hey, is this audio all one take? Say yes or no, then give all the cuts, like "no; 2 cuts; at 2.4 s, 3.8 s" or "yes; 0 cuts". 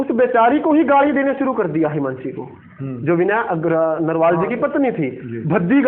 yes; 0 cuts